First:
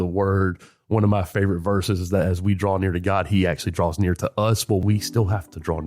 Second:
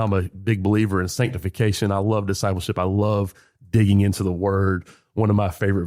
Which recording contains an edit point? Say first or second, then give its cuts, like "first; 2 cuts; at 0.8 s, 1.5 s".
first; 1 cut; at 4.8 s